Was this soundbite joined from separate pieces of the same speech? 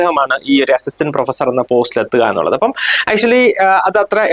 no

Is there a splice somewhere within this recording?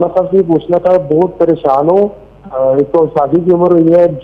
no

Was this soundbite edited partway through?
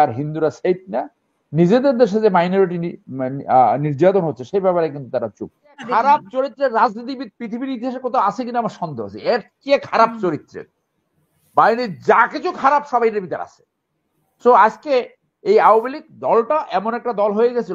yes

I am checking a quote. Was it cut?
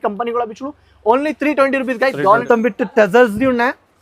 yes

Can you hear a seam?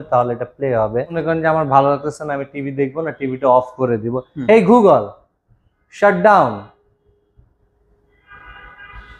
yes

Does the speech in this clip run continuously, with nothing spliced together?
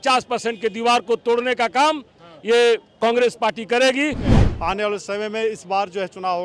no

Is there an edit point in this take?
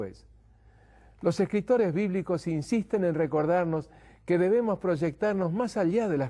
yes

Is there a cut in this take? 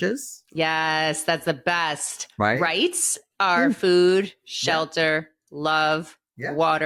no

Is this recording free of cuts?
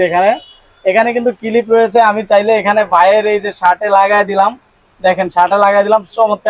yes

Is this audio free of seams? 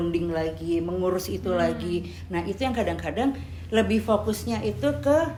yes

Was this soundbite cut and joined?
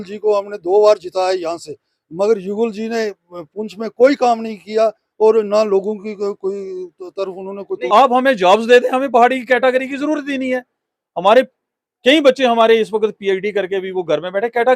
yes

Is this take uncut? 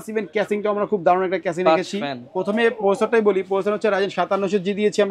yes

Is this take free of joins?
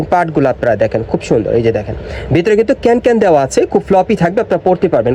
yes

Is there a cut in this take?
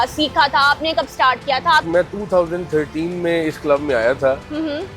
yes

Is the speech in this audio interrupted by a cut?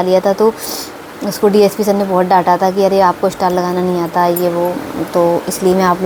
no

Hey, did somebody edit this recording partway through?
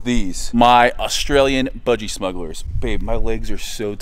no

